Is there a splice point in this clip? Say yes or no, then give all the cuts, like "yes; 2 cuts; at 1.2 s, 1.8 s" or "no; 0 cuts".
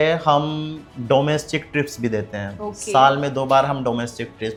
no; 0 cuts